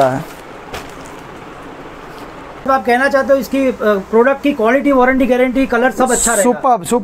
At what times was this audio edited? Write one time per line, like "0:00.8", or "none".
0:02.7